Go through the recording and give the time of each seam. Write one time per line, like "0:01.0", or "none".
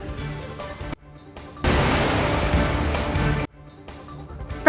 0:01.6
0:03.4

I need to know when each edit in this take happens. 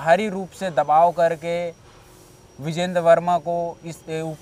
none

